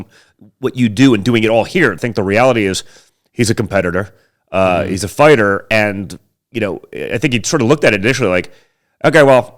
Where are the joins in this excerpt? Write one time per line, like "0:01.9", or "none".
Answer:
0:02.0